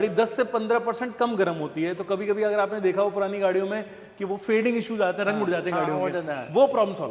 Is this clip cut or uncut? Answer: uncut